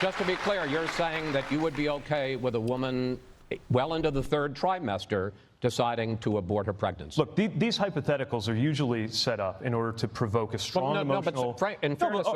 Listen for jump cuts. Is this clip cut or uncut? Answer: cut